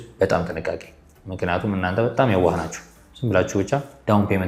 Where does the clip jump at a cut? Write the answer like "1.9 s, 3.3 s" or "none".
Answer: none